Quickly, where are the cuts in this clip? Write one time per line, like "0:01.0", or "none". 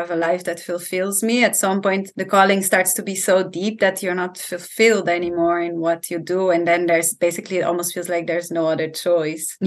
none